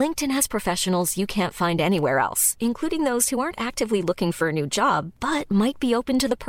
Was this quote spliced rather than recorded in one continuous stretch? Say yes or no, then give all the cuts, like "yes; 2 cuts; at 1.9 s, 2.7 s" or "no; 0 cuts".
no; 0 cuts